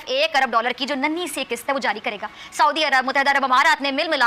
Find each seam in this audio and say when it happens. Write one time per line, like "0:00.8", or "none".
none